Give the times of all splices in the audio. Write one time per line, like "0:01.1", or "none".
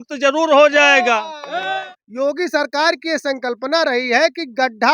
0:01.6